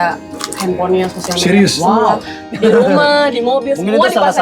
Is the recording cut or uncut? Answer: cut